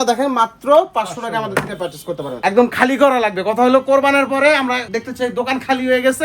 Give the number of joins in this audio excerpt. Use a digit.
2